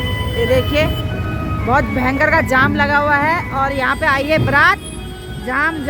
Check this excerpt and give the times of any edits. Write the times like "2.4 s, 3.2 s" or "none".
none